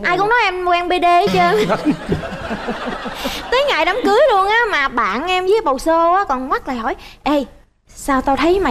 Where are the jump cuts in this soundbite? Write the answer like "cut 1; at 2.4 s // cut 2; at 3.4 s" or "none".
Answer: none